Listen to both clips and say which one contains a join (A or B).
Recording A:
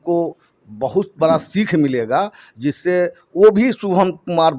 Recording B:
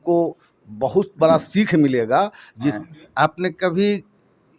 B